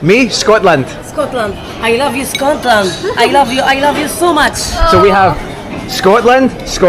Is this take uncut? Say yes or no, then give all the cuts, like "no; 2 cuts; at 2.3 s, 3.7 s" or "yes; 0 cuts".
yes; 0 cuts